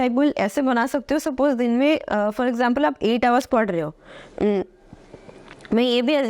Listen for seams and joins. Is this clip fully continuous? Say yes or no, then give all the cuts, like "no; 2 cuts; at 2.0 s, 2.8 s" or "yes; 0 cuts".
yes; 0 cuts